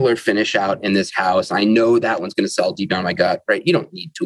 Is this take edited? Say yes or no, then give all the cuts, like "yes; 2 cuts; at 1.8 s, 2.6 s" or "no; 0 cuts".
no; 0 cuts